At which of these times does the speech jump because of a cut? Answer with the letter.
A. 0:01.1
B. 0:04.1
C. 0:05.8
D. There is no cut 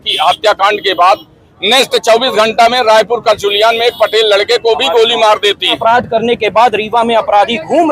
C